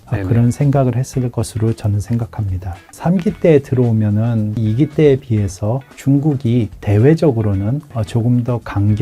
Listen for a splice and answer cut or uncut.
cut